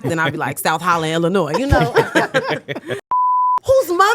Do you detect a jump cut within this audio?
yes; 1 cut; at 3.2 s

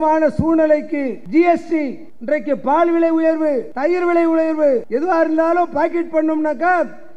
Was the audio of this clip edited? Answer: yes; 4 cuts; at 1.2 s, 2.1 s, 3.7 s, 4.9 s

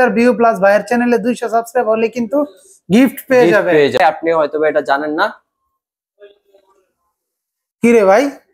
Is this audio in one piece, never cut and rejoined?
no; 1 cut; at 4.0 s

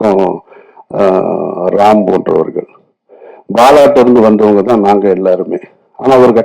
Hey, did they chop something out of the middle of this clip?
no; 0 cuts

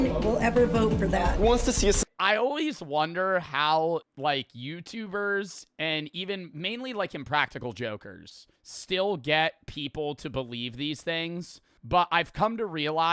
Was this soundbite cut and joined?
yes; 1 cut; at 9.0 s

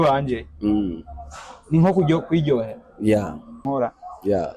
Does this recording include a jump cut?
yes; 1 cut; at 3.6 s

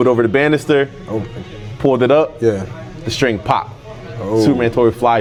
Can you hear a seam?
no; 0 cuts

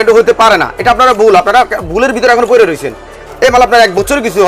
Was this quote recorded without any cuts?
no; 1 cut; at 3.2 s

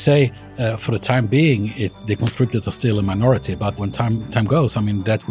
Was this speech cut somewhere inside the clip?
yes; 1 cut; at 3.8 s

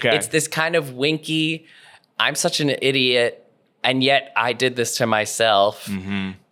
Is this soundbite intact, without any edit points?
yes; 0 cuts

